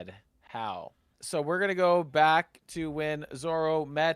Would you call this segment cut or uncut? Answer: cut